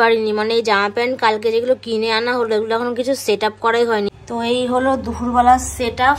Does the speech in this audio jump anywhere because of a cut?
yes; 1 cut; at 4.1 s

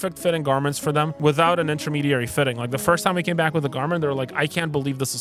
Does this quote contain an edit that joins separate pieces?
no; 0 cuts

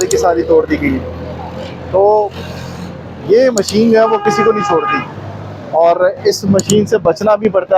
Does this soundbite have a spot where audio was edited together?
no; 0 cuts

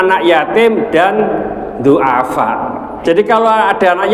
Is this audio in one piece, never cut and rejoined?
no; 1 cut; at 2.9 s

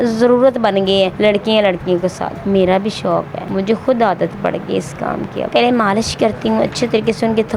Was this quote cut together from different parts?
yes; 4 cuts; at 1.1 s, 2.3 s, 3.4 s, 5.5 s

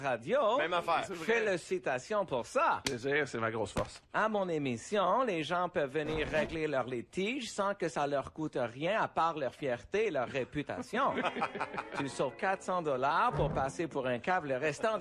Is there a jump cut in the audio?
yes; 1 cut; at 3.9 s

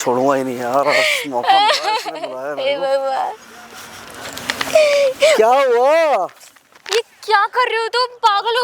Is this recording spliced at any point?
no; 0 cuts

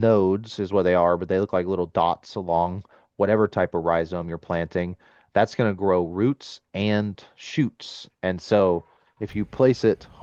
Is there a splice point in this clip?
no; 0 cuts

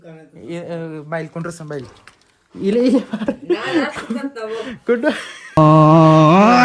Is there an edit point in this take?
yes; 1 cut; at 5.6 s

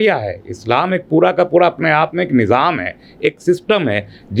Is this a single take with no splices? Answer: yes; 0 cuts

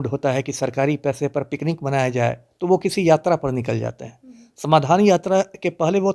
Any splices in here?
no; 0 cuts

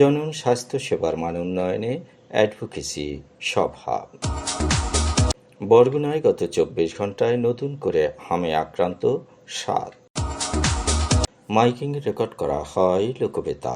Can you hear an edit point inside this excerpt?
yes; 2 cuts; at 10.0 s, 11.4 s

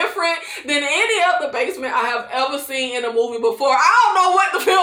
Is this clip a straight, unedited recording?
yes; 0 cuts

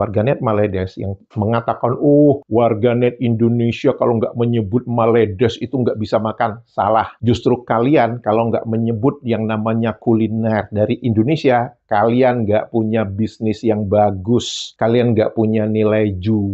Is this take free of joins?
yes; 0 cuts

